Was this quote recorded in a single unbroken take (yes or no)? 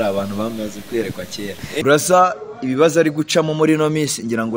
no